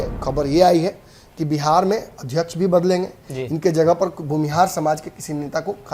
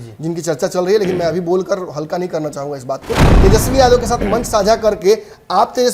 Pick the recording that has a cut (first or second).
second